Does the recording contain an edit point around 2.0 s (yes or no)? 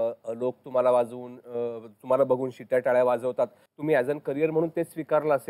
no